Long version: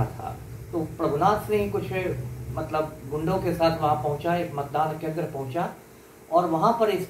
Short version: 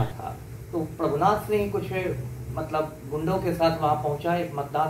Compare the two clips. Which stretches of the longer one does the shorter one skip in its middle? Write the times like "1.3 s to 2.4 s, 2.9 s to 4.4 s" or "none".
none